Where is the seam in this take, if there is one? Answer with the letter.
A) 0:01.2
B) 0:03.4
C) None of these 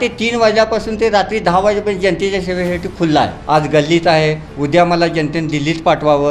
B